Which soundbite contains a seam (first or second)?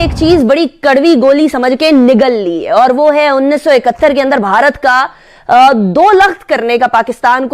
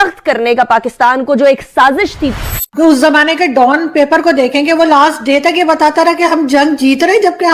second